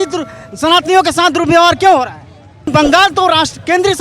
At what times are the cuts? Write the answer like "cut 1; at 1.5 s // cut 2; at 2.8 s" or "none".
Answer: cut 1; at 2.7 s